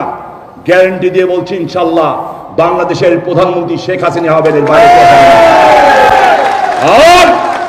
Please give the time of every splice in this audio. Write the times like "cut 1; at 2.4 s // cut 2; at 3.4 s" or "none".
none